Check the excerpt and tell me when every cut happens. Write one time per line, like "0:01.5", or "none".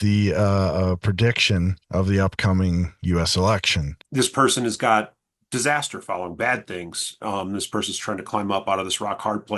0:04.0